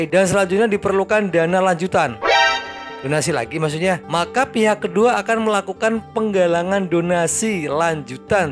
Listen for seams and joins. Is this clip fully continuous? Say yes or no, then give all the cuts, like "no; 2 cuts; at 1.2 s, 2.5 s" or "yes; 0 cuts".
yes; 0 cuts